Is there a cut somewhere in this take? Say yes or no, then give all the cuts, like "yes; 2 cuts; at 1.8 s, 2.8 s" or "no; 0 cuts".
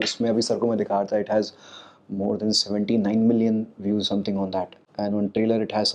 yes; 1 cut; at 4.8 s